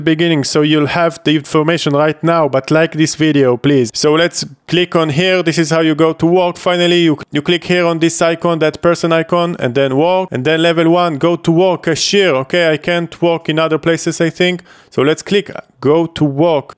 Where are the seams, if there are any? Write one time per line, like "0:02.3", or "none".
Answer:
0:03.9

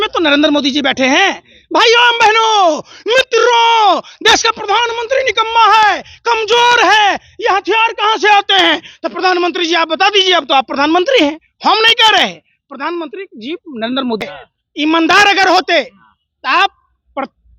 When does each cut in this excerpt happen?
none

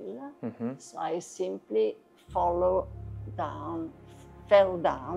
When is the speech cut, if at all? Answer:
none

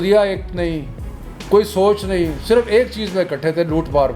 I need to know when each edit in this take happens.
none

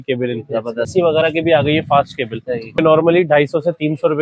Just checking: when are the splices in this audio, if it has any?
0:00.9
0:02.8

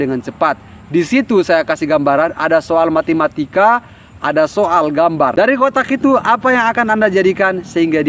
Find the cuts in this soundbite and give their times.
0:05.3

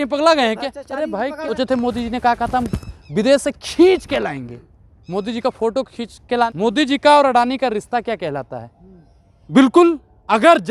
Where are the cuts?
0:01.6
0:06.5
0:09.3

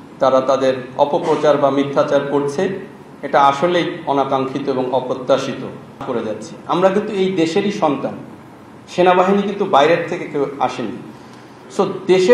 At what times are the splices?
0:06.0

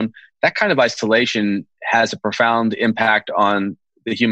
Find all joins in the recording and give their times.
none

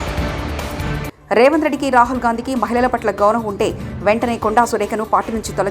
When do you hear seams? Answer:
0:01.1

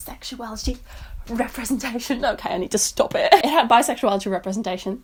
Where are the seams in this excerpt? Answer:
none

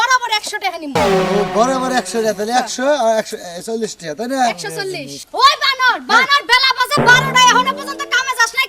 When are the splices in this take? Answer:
0:05.2

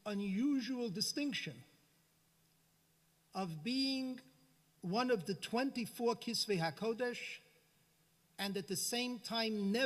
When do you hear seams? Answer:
none

